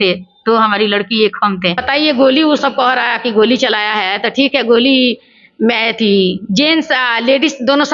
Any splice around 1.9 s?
yes; 1 cut; at 1.9 s

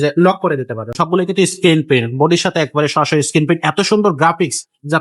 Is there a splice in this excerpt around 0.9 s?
yes; 1 cut; at 0.9 s

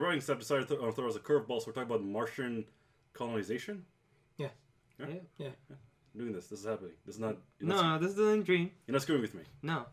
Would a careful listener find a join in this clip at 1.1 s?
no; 1 cut; at 6.6 s

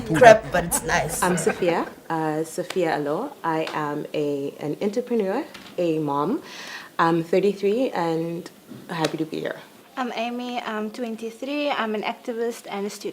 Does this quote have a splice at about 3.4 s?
yes; 1 cut; at 3.4 s

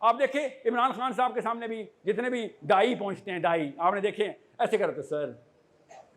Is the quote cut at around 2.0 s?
no; 0 cuts

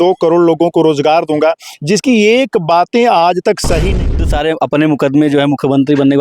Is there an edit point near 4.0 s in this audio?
yes; 1 cut; at 4.0 s

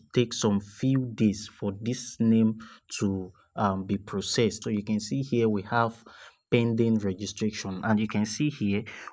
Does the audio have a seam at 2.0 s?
no; 1 cut; at 4.6 s

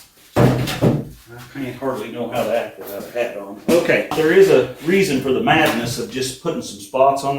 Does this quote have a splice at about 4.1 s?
yes; 1 cut; at 4.1 s

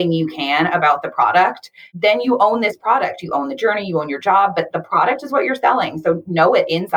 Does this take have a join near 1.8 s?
yes; 1 cut; at 1.8 s

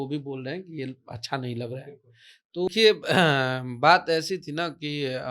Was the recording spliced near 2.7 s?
yes; 1 cut; at 2.7 s

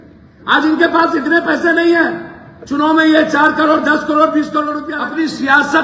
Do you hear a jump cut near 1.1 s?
no; 1 cut; at 4.9 s

